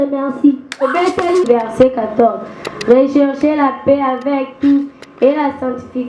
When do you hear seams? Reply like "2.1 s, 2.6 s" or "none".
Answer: 1.4 s